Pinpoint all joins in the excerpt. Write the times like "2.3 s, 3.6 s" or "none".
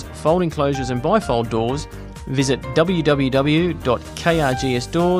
none